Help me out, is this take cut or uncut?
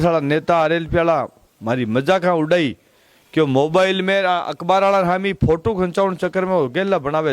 uncut